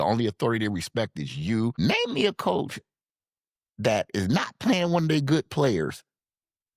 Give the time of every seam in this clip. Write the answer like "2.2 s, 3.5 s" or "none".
1.7 s